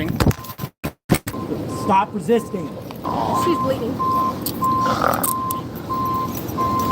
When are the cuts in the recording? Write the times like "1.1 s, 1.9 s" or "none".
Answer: 1.3 s, 3.0 s